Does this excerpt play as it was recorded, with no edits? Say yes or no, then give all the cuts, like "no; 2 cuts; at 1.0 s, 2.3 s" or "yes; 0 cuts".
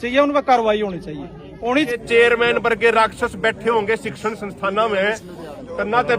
no; 1 cut; at 1.9 s